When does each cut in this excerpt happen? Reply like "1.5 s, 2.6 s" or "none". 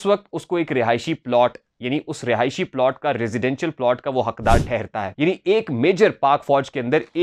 5.0 s